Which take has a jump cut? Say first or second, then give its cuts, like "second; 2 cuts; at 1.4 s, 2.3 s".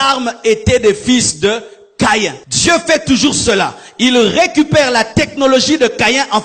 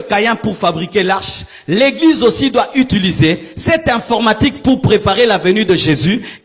first; 1 cut; at 2.4 s